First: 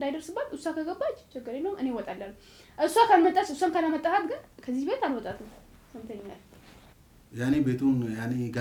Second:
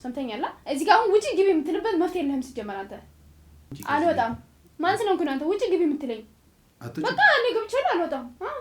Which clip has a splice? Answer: second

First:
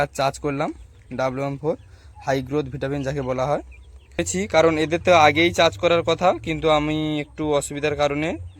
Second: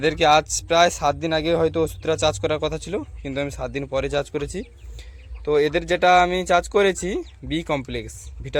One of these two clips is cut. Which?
first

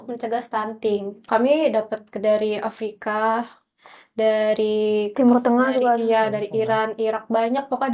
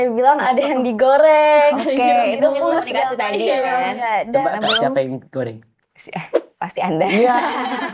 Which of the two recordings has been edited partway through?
first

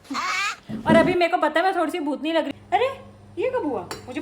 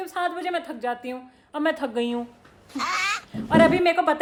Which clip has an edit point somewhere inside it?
first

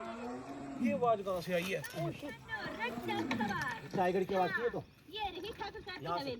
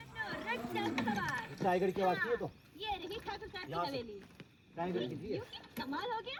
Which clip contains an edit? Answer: first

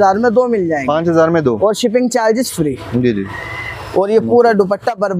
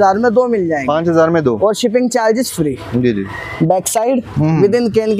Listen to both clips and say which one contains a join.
second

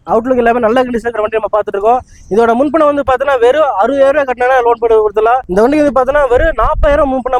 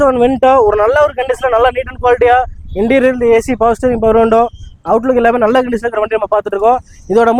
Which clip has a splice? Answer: first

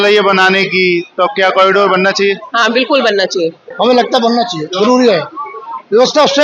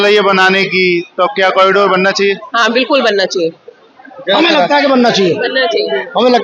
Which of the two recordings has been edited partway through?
first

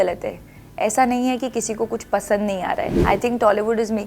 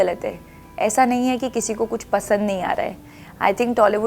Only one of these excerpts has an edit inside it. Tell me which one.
first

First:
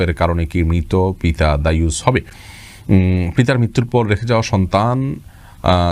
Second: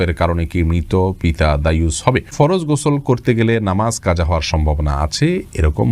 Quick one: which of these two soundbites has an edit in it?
second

